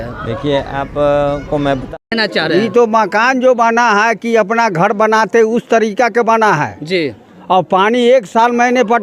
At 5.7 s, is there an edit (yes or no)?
no